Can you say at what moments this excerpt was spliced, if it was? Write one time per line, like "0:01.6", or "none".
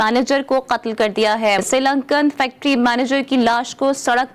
0:01.6